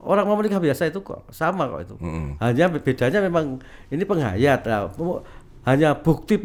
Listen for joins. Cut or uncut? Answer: uncut